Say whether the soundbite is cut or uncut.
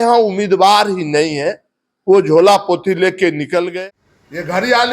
cut